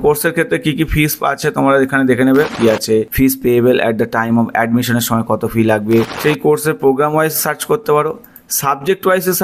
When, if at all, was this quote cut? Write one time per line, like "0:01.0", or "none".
0:02.5
0:06.1